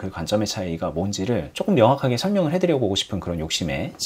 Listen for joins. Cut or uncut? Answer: cut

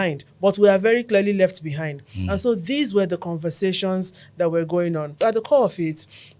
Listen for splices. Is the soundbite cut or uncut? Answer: cut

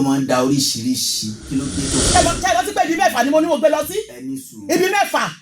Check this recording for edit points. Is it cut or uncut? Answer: cut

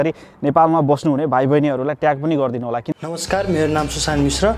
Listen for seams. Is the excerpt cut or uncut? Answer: cut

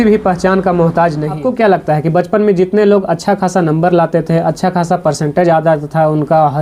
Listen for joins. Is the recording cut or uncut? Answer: cut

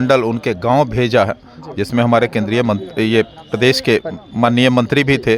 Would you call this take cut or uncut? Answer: uncut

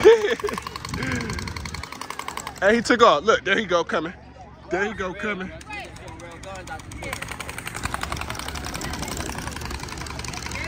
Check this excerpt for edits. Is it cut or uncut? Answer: uncut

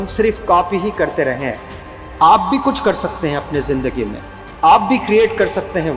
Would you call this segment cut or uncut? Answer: uncut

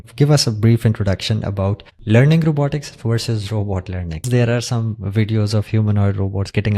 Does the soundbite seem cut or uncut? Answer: cut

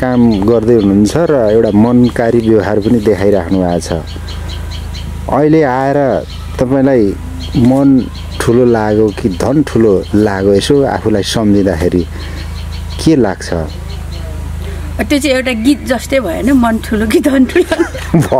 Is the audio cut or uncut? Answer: uncut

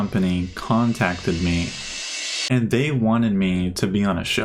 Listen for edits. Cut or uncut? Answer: uncut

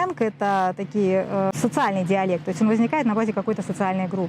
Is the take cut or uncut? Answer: cut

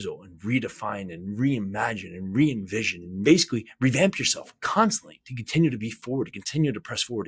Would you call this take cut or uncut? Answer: cut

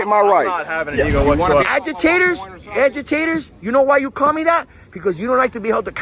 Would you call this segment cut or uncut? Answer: cut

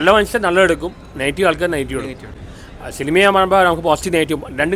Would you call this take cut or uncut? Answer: uncut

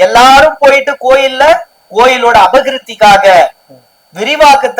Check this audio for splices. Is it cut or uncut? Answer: uncut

